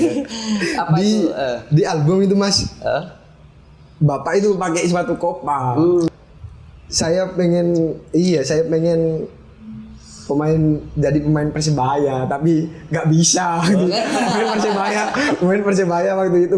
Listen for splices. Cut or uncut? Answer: cut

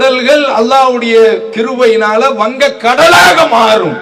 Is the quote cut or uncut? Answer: uncut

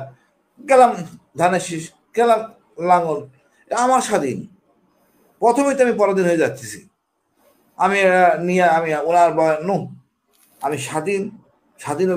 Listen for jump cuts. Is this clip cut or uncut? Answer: uncut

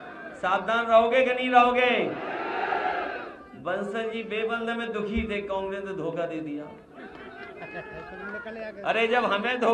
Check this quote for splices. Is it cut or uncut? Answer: uncut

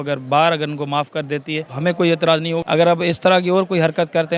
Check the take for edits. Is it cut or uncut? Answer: cut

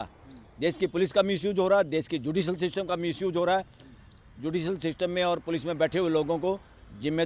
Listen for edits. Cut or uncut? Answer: uncut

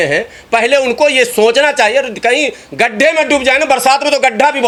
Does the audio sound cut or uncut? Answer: uncut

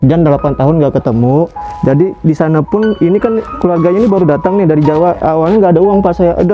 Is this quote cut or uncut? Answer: uncut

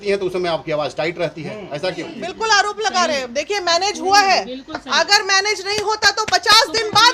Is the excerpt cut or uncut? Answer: cut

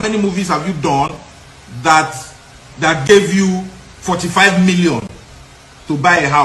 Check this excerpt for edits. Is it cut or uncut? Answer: uncut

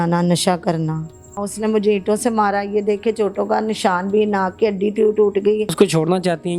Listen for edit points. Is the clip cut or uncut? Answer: cut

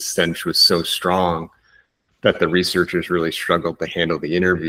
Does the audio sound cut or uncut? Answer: uncut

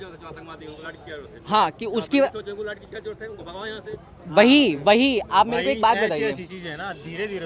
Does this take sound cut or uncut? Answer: uncut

